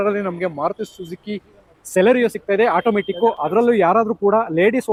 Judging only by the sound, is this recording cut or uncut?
uncut